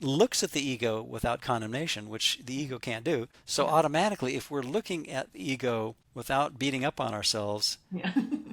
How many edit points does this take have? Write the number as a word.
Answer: zero